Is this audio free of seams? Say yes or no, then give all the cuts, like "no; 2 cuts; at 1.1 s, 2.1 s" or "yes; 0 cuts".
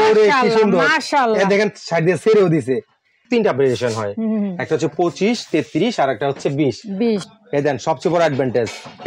no; 2 cuts; at 3.2 s, 7.3 s